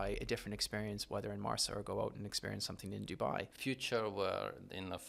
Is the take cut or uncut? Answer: cut